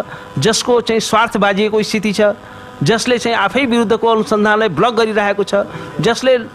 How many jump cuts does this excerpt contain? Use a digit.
0